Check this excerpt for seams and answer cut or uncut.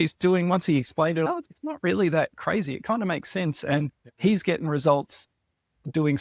cut